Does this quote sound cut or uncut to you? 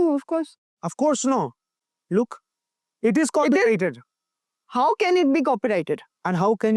uncut